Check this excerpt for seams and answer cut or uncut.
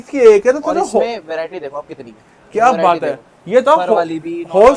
uncut